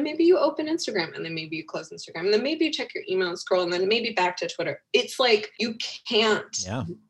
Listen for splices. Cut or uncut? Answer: cut